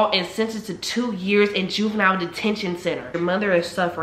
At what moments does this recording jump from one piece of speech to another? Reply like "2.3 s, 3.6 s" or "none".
3.1 s

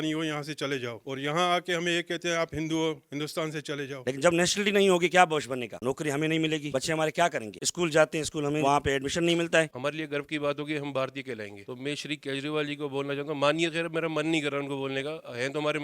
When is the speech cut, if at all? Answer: 1.0 s, 4.0 s, 8.6 s, 9.7 s, 11.6 s

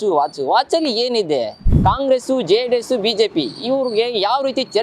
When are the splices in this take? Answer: 1.6 s

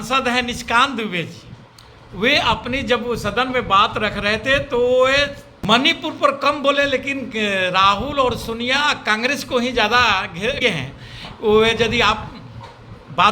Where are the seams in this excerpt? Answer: 5.5 s, 10.6 s

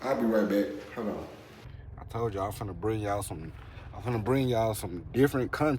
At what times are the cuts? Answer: 1.5 s

